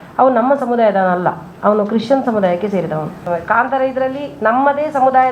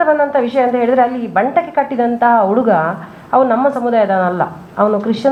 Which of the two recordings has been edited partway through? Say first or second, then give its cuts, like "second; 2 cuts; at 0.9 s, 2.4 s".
first; 1 cut; at 3.2 s